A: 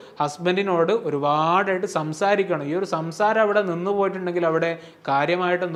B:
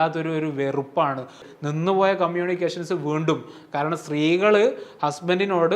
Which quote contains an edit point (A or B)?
B